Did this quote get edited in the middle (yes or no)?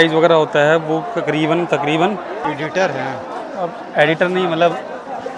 yes